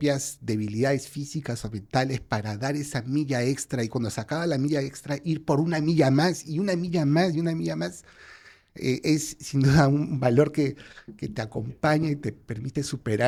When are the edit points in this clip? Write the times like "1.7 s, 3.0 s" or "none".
none